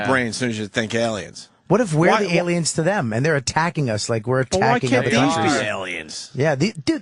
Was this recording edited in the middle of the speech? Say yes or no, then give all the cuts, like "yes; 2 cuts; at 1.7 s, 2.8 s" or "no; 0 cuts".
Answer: no; 0 cuts